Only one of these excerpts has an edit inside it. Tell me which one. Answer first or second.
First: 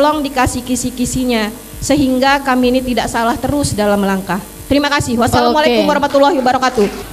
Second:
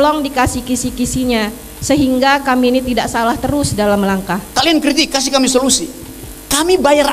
second